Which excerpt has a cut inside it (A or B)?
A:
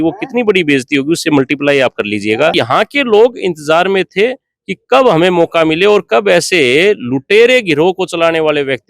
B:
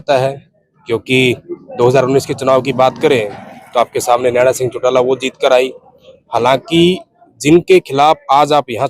A